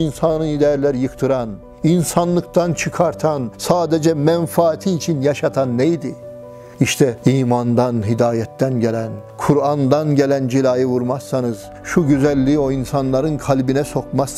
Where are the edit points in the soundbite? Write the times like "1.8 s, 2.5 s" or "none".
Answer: none